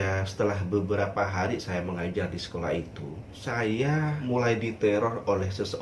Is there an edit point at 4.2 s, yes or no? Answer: yes